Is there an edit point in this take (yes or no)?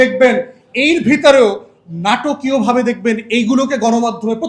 no